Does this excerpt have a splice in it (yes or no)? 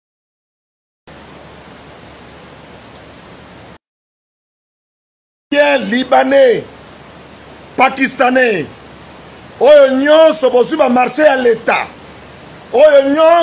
no